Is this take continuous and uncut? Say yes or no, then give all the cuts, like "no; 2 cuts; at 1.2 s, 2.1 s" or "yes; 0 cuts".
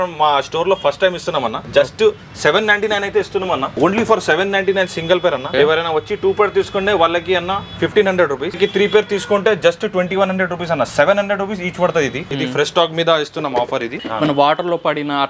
no; 6 cuts; at 1.6 s, 3.7 s, 5.5 s, 8.6 s, 12.2 s, 14.0 s